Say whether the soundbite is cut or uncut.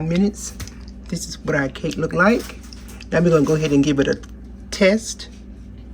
uncut